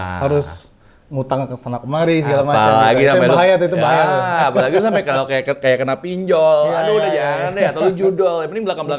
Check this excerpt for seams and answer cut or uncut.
uncut